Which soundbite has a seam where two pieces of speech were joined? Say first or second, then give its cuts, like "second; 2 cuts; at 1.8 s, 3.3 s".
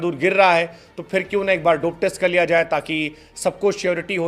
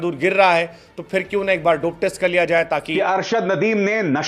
second; 1 cut; at 2.7 s